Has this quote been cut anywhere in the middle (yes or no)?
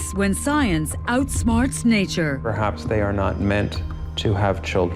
yes